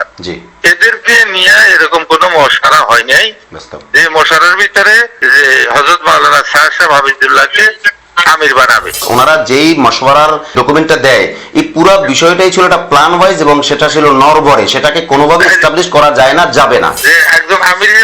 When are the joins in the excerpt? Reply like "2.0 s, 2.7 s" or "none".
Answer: 9.0 s, 17.0 s